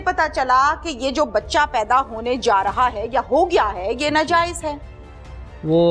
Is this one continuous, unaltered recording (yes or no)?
yes